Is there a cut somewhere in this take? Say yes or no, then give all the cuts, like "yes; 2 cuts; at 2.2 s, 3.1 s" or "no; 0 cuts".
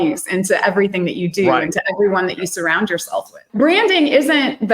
yes; 1 cut; at 3.4 s